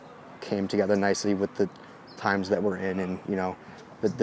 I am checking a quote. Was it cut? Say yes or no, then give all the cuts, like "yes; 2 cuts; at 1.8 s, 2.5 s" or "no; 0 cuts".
no; 0 cuts